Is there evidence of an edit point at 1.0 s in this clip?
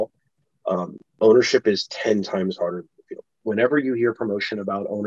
no; 1 cut; at 3.4 s

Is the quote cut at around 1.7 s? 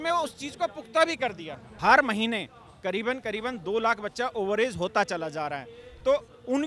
yes; 1 cut; at 1.7 s

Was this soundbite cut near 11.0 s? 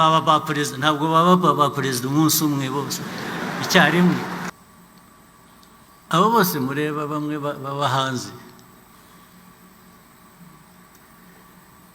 no; 1 cut; at 4.5 s

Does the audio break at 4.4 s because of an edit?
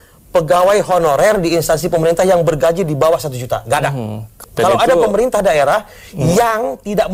yes; 1 cut; at 4.4 s

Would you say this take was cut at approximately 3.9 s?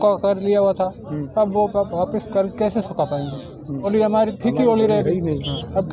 yes; 1 cut; at 3.9 s

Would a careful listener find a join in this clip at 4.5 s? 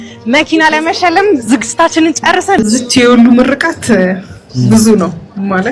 no; 1 cut; at 2.6 s

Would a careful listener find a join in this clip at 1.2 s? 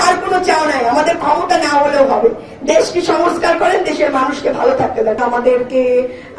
no; 1 cut; at 5.2 s

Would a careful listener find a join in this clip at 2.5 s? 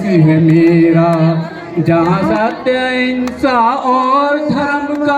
no; 0 cuts

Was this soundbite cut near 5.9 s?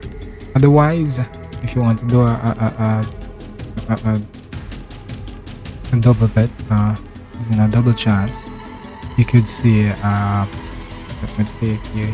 yes; 2 cuts; at 4.3 s, 5.9 s

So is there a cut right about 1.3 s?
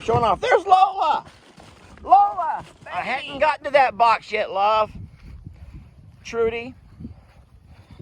no; 1 cut; at 3.2 s

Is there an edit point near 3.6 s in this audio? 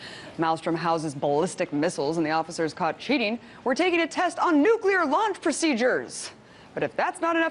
no; 1 cut; at 5.6 s

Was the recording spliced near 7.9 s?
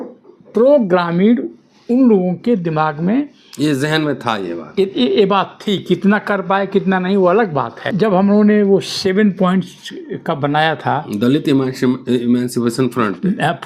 yes; 1 cut; at 7.9 s

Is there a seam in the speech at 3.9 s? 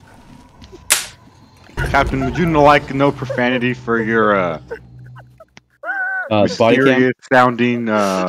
no; 1 cut; at 1.8 s

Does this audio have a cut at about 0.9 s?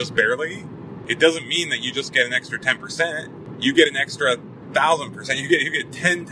yes; 2 cuts; at 0.9 s, 3.4 s

